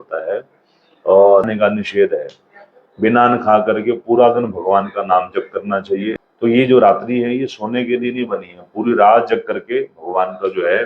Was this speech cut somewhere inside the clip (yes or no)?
yes